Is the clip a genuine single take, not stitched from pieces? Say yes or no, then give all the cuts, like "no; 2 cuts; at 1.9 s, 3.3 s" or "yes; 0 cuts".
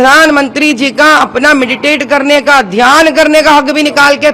yes; 0 cuts